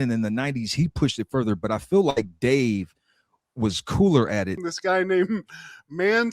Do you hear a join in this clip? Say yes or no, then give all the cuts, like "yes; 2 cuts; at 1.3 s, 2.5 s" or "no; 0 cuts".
yes; 1 cut; at 4.6 s